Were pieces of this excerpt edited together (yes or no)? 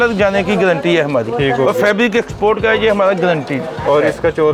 no